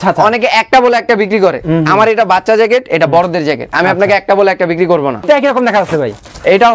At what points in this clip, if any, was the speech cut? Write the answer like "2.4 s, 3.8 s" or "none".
5.2 s